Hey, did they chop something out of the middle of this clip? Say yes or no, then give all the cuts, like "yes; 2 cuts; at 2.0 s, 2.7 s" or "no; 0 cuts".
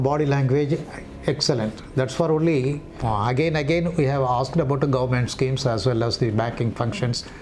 yes; 1 cut; at 2.9 s